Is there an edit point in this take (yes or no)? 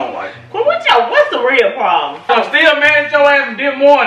yes